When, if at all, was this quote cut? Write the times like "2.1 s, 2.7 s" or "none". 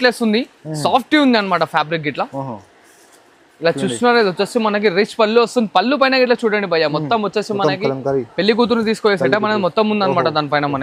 none